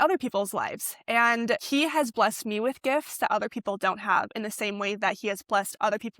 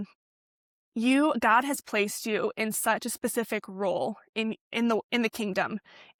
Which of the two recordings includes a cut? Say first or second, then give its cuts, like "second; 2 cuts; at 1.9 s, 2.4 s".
first; 1 cut; at 1.6 s